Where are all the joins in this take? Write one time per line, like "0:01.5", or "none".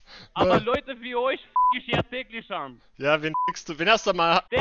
none